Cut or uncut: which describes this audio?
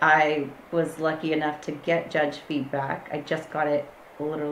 uncut